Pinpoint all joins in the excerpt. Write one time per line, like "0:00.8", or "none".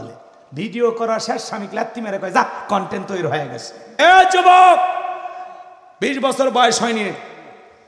0:03.8